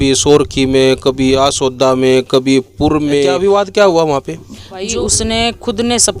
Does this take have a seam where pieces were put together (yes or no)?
yes